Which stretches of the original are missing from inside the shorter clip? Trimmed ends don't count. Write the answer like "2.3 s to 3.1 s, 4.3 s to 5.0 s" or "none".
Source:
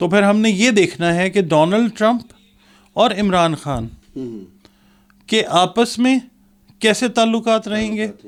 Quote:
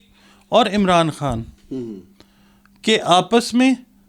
none